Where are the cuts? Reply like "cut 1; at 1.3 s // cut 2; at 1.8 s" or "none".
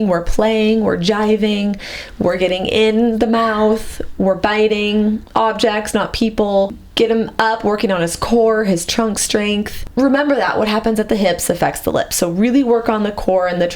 cut 1; at 6.8 s // cut 2; at 9.8 s